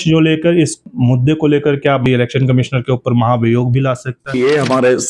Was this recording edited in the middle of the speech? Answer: yes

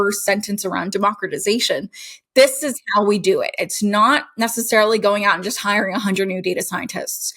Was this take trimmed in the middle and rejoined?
yes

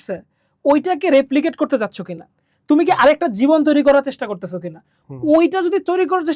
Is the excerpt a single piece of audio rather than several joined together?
yes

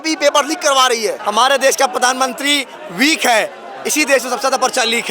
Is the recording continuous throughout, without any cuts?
no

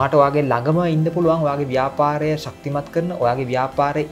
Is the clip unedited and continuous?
yes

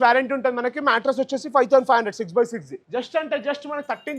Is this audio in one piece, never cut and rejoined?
no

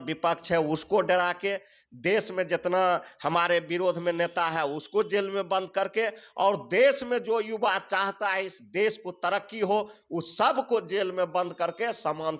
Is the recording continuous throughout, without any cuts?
yes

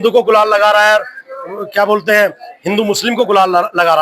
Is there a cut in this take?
no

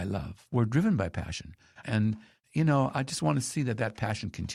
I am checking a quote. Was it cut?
no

